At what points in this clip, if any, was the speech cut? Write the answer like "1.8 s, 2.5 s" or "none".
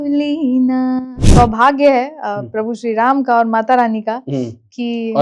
1.2 s